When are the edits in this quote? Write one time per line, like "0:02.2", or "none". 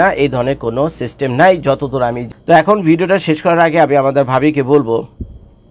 0:02.2

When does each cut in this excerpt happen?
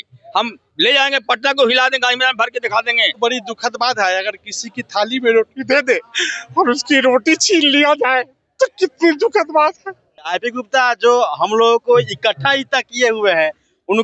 0:03.2
0:10.4

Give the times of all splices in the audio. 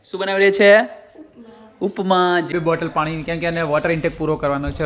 0:02.5

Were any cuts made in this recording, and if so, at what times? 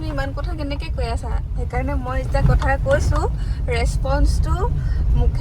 none

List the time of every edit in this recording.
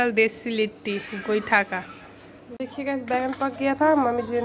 0:02.6

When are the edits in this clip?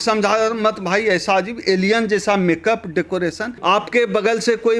0:03.5

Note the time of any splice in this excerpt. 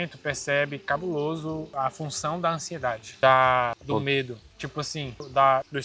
none

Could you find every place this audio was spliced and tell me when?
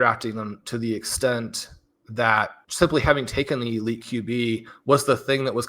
0:02.6

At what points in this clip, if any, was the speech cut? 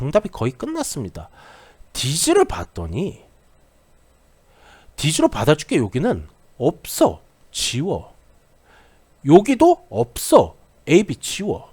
0:10.7

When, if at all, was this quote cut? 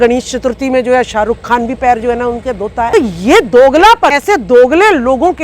0:02.9
0:04.2

